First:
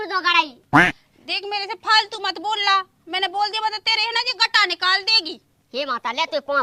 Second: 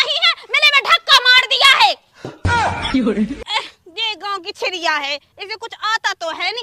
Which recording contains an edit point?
second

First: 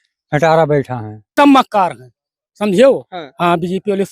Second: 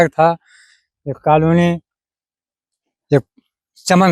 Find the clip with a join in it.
first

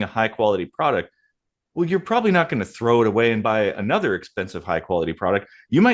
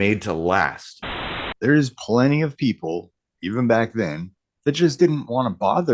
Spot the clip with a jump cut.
second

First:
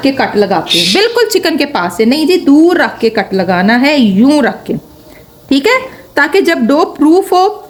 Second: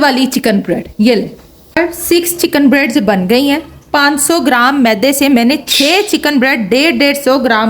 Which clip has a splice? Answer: second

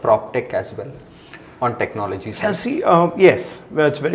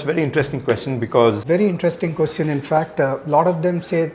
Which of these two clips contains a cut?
second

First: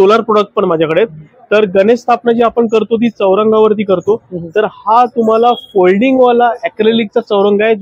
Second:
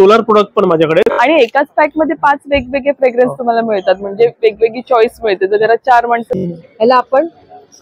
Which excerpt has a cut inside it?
second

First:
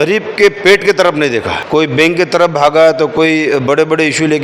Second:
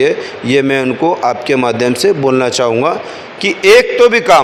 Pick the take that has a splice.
first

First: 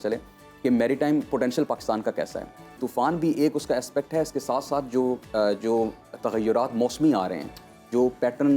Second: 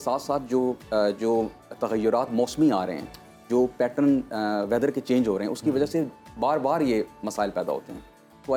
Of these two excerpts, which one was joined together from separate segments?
first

